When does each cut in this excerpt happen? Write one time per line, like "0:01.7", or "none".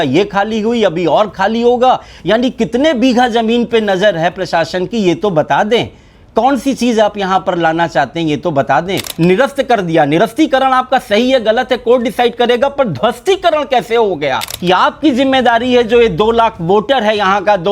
0:09.0
0:14.5